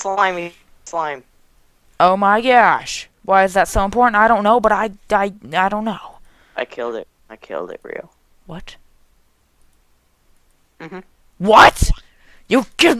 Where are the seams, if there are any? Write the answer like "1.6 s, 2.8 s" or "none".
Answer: none